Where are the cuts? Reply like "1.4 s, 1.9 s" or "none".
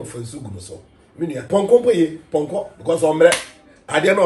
1.5 s